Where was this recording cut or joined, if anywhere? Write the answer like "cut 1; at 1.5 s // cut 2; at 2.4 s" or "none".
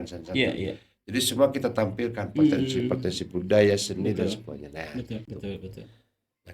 cut 1; at 5.3 s